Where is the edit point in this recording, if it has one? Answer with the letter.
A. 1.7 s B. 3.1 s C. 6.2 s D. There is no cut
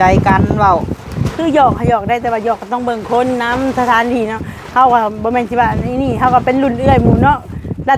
D